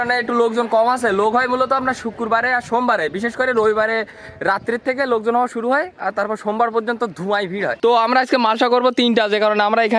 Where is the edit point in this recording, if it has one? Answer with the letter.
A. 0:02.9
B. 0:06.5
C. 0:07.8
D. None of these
C